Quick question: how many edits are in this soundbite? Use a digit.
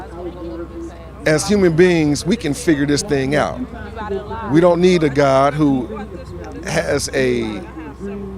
1